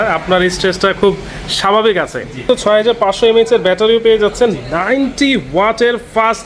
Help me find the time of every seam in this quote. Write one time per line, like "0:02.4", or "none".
0:02.4